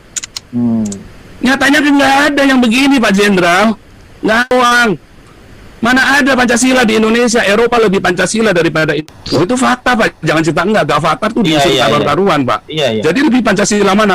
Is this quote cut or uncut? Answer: cut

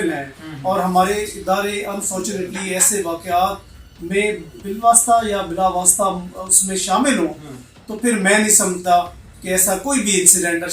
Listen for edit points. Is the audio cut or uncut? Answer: cut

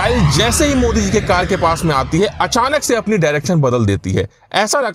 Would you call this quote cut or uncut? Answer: uncut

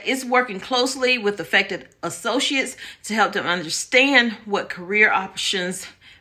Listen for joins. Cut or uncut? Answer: uncut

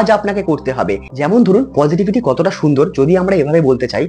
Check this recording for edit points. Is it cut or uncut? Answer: cut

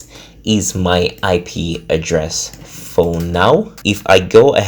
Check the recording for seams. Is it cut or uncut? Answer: cut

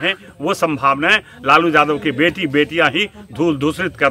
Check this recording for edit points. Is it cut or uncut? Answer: uncut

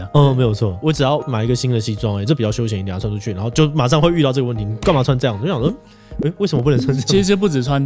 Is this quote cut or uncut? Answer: uncut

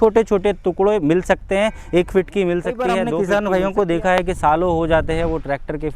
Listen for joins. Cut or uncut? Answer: cut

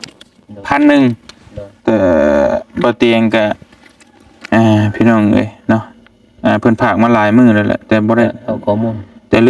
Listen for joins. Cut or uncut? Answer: uncut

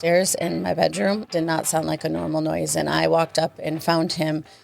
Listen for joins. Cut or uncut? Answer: cut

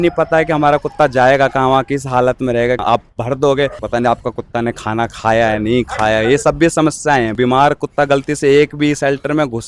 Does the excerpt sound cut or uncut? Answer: cut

